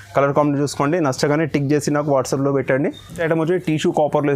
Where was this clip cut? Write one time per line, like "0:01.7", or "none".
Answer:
none